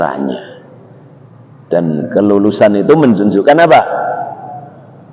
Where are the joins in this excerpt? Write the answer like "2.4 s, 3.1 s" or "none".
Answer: none

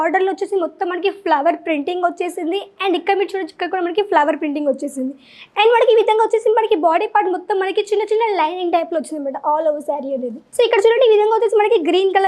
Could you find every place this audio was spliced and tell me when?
10.4 s

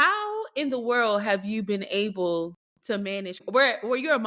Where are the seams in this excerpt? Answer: 3.4 s

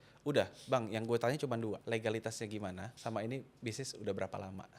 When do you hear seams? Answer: 1.8 s, 2.9 s

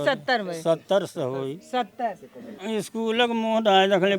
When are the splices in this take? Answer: 2.5 s

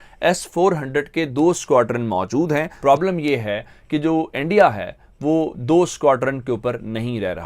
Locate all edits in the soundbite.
2.7 s

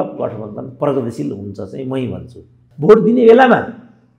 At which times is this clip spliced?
2.6 s

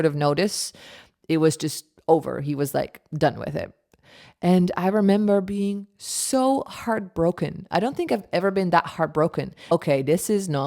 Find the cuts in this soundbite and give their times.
9.7 s

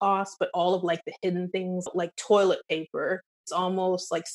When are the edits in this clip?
1.9 s, 3.3 s

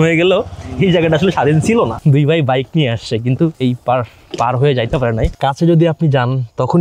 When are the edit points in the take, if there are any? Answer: 2.0 s, 3.6 s, 5.3 s

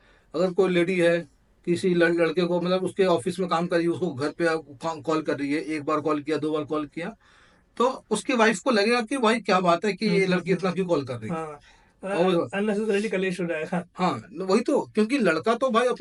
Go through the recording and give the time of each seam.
none

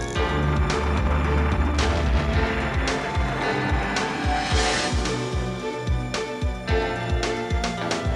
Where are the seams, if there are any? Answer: 7.1 s

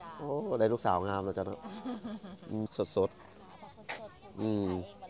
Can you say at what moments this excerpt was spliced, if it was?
2.7 s

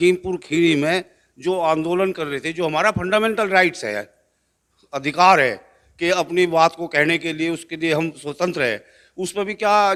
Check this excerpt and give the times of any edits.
none

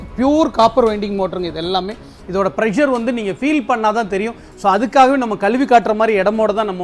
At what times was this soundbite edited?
none

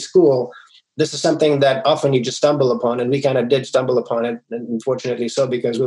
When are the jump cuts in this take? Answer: none

